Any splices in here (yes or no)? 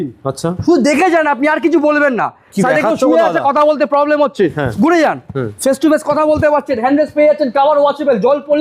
no